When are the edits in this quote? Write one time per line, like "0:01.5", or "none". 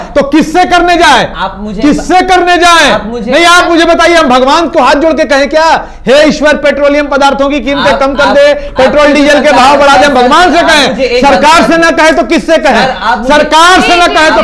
none